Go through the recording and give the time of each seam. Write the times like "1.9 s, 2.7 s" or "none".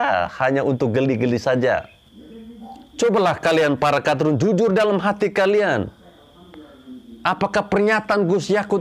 2.5 s